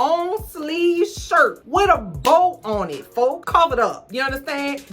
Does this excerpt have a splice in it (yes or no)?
yes